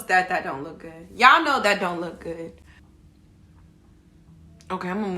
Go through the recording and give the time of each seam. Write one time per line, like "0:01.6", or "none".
none